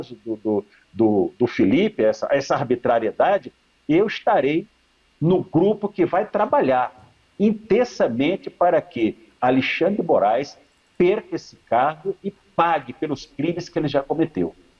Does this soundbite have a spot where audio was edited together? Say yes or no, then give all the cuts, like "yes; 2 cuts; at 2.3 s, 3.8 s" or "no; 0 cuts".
no; 0 cuts